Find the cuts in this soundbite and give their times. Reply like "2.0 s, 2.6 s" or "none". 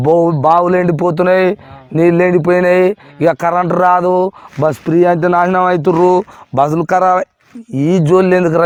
none